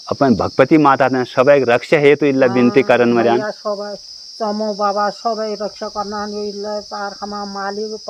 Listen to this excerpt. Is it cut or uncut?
uncut